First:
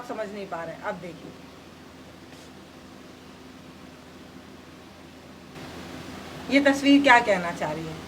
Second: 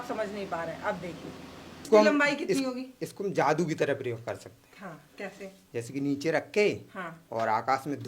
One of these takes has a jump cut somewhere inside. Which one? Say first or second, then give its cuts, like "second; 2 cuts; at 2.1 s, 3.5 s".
second; 1 cut; at 1.9 s